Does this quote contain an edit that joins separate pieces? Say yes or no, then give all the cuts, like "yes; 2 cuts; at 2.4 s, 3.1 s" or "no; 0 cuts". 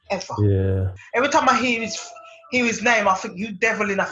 yes; 1 cut; at 0.9 s